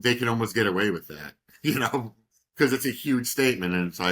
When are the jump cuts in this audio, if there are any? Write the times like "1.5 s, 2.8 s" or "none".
none